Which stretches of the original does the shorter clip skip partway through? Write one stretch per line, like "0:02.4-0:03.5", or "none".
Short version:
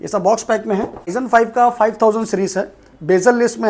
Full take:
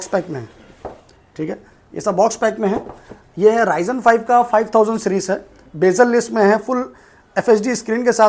0:03.0-0:03.8